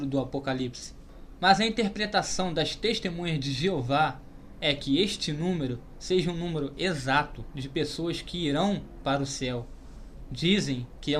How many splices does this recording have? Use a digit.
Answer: 1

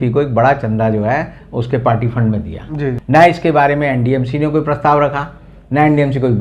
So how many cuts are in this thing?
1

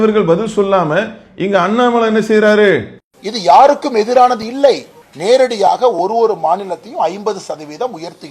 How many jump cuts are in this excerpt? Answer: 1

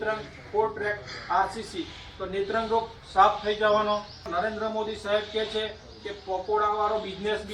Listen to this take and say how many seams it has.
1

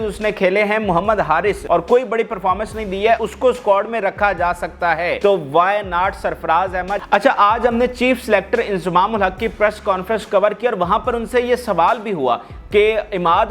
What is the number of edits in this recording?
4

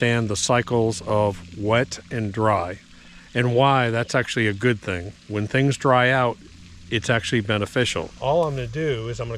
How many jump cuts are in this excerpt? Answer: 1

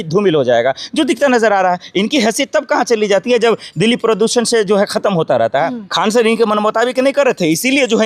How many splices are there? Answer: 1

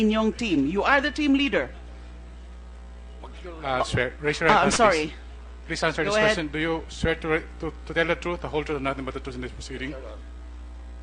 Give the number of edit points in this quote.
1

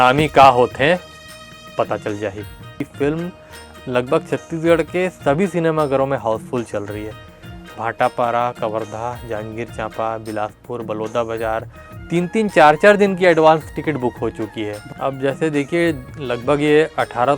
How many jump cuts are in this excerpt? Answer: 2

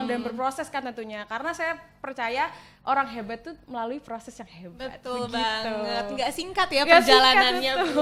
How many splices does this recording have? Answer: 0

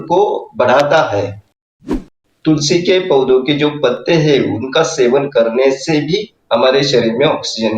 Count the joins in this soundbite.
1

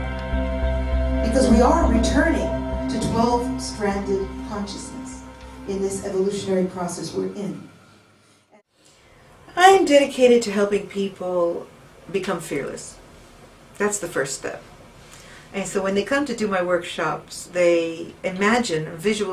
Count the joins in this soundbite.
1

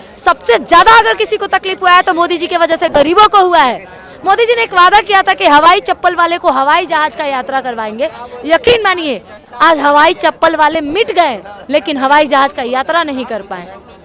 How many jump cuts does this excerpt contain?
0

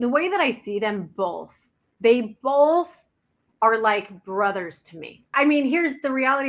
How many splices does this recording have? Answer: 1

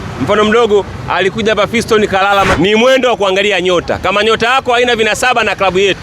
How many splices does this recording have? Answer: 1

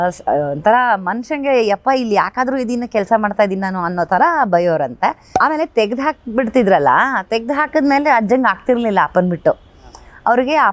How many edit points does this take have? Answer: 1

